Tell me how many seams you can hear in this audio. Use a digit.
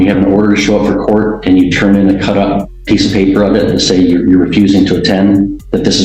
1